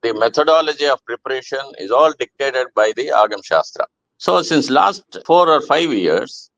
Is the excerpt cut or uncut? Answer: cut